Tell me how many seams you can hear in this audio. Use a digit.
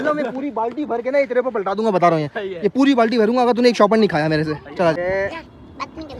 1